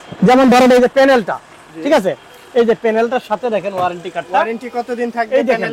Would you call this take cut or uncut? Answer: uncut